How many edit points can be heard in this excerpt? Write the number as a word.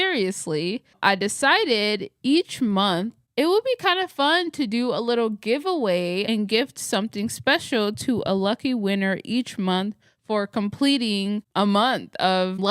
one